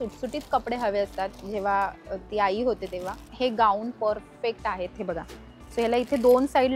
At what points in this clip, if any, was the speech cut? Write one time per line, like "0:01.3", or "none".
0:03.2